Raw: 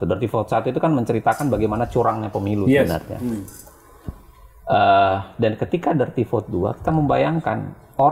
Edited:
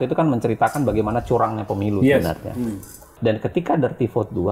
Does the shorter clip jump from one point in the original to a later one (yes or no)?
yes